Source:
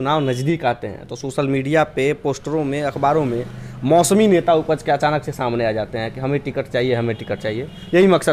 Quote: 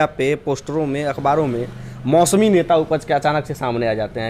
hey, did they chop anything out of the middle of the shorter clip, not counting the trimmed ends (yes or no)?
no